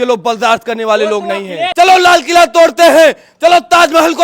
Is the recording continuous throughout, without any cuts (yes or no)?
no